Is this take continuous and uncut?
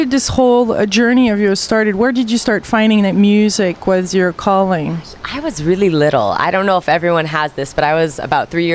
yes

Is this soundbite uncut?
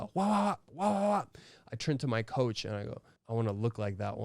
no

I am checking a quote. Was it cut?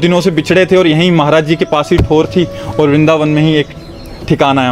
no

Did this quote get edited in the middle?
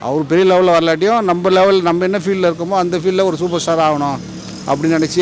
no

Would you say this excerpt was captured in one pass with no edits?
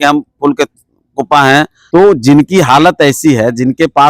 no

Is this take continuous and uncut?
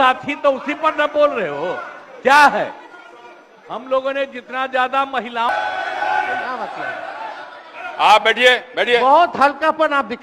no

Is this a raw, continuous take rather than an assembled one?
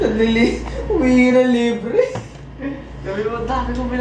yes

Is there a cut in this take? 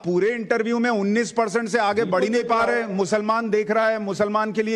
no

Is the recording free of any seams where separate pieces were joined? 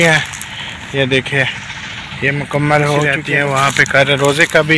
no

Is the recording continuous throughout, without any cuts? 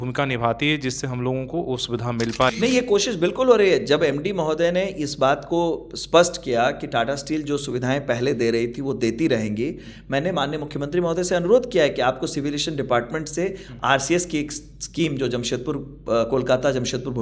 yes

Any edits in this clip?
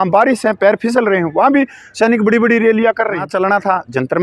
yes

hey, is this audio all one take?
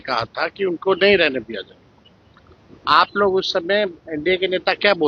yes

